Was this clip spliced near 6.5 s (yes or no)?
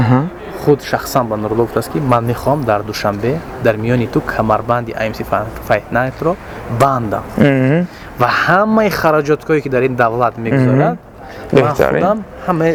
no